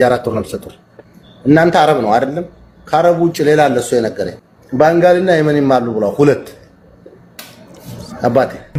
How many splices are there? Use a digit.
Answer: 0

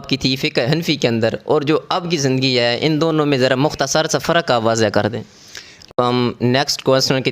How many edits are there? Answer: 1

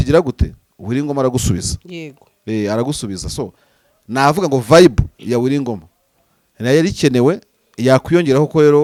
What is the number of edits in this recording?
0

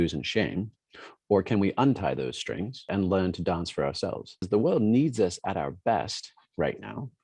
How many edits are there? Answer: 2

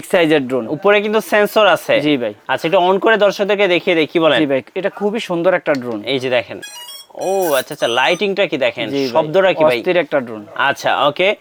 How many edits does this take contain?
0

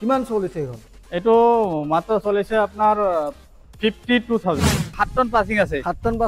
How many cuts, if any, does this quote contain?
1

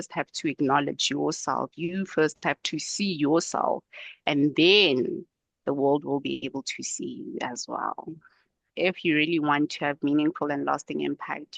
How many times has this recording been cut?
1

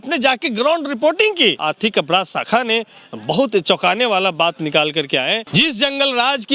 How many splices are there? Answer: 2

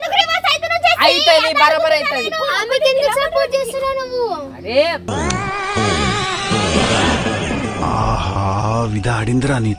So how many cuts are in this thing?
0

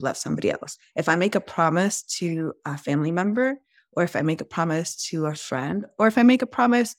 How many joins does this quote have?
0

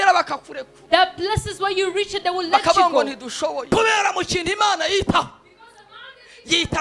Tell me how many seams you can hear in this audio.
1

